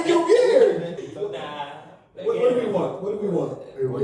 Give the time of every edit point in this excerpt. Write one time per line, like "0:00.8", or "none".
0:01.0